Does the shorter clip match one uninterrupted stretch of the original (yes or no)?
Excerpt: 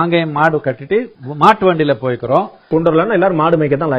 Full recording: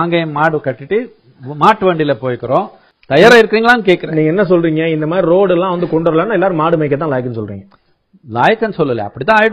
no